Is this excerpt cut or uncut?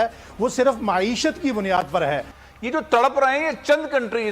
cut